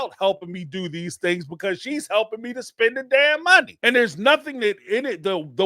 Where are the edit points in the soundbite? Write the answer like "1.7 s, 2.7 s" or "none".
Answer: 3.7 s